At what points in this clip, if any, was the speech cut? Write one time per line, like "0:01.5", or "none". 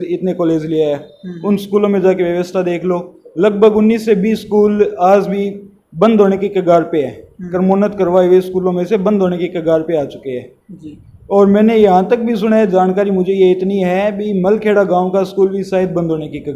none

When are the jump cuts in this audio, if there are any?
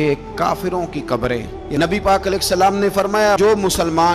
0:01.6

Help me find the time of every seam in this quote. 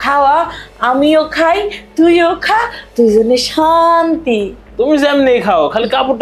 0:04.6

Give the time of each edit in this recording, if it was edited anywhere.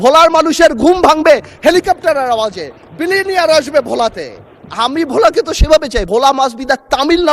0:06.1

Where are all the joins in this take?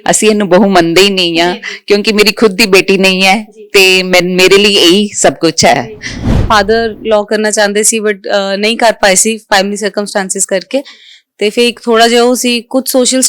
0:06.3

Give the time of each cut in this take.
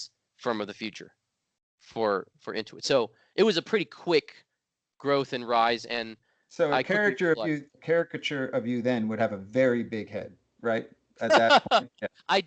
none

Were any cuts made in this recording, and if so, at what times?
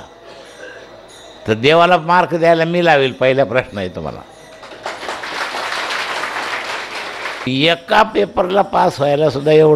0:07.5

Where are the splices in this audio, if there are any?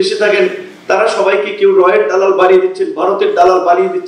none

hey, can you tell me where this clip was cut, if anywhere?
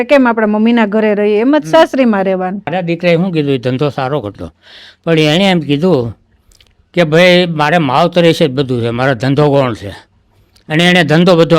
0:02.7

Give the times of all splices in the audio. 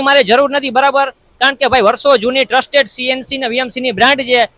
none

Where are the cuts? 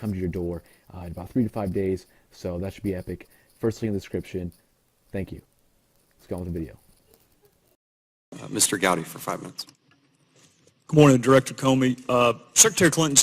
0:09.0

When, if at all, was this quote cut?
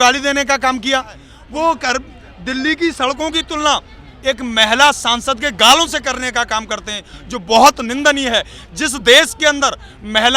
0:01.3

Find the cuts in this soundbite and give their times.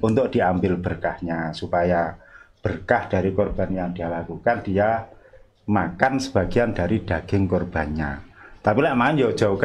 none

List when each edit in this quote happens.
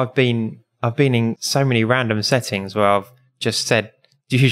0:01.4

